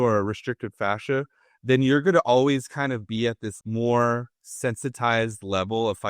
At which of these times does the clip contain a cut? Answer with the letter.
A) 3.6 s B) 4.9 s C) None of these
A